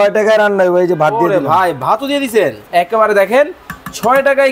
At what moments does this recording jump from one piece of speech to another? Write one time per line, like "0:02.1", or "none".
0:02.6